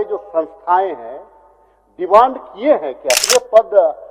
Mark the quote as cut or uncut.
cut